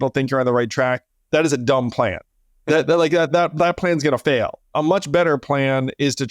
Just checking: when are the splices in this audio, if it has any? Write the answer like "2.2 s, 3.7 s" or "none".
4.7 s